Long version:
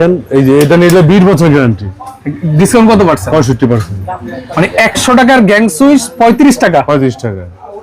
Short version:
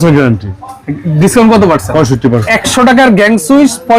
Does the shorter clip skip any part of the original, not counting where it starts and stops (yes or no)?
yes